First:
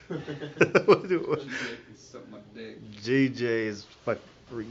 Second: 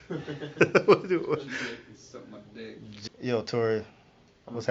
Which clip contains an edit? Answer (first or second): second